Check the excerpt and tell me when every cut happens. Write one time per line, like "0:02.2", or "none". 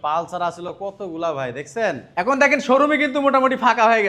none